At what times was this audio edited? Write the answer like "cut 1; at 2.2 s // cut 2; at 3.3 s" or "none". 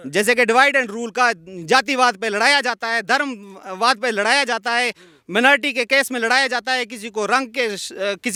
none